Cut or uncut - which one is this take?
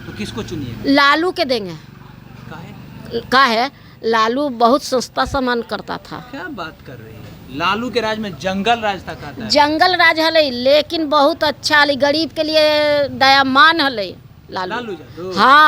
uncut